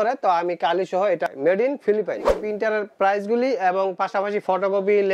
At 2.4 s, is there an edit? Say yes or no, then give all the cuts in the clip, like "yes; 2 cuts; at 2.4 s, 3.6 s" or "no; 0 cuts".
yes; 2 cuts; at 1.3 s, 2.4 s